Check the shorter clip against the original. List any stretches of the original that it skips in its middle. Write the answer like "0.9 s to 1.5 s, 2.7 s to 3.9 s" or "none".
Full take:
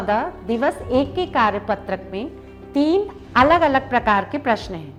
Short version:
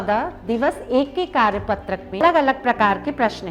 2.2 s to 3.5 s